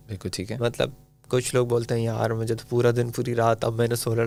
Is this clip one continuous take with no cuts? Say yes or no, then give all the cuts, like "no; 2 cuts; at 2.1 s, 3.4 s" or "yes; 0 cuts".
yes; 0 cuts